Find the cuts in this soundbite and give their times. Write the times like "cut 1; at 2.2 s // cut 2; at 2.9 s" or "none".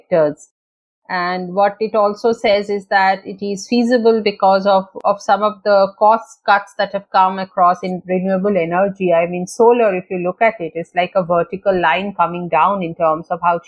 none